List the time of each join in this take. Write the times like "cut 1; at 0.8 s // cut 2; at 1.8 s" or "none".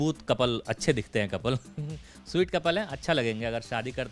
none

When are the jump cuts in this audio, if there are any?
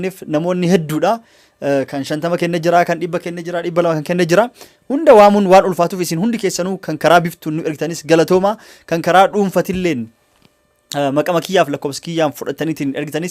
none

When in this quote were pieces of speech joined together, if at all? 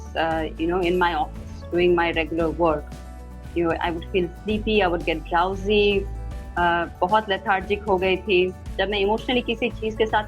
cut 1; at 8.6 s

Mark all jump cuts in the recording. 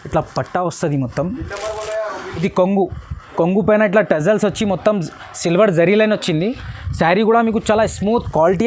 cut 1; at 2.2 s

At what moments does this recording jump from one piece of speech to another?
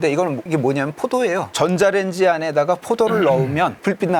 none

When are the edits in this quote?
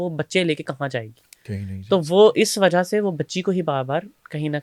none

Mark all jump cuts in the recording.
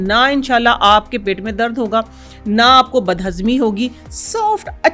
none

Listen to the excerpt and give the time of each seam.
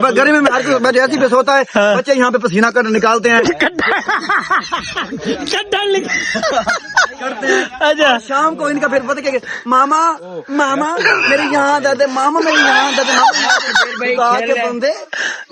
none

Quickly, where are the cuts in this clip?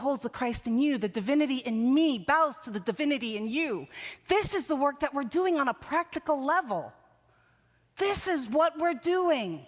none

